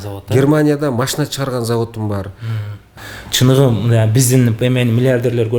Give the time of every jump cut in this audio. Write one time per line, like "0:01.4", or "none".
0:02.9